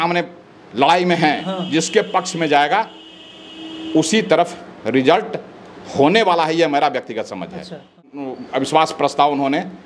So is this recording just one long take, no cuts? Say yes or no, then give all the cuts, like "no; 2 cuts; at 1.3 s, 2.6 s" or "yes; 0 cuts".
no; 1 cut; at 8.0 s